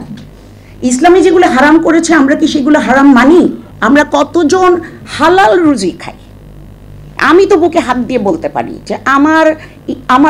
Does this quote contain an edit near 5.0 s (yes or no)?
no